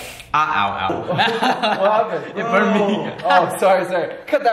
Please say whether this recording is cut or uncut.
uncut